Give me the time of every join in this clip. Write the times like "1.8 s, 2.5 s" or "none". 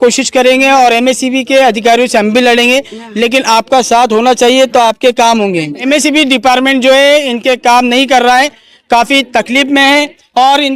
5.8 s